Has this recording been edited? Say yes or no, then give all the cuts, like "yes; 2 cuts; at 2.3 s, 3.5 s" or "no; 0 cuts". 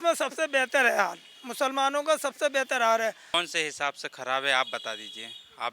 yes; 1 cut; at 3.3 s